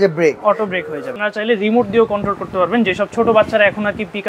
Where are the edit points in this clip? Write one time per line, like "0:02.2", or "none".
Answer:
0:01.2